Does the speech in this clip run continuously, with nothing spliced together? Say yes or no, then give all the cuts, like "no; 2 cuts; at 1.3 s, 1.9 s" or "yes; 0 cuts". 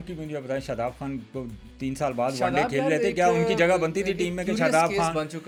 yes; 0 cuts